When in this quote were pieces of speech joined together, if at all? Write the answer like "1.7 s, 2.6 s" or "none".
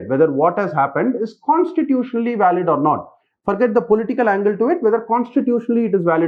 none